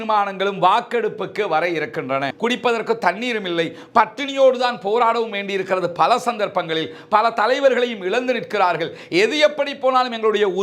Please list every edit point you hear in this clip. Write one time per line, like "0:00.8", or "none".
0:02.3